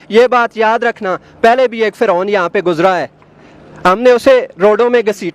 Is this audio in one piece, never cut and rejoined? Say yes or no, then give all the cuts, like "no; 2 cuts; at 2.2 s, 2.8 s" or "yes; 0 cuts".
yes; 0 cuts